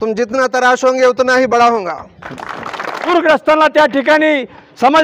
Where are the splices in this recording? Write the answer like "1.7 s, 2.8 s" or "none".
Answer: 3.1 s